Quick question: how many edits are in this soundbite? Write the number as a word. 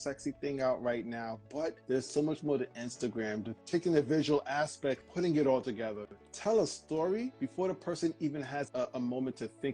three